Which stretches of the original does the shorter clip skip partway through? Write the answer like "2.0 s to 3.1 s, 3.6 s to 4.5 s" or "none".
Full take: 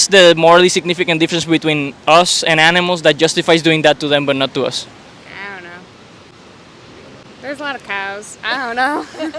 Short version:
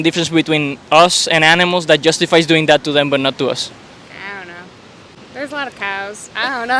6.3 s to 7.2 s